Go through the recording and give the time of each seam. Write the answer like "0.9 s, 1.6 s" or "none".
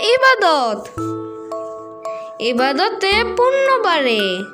none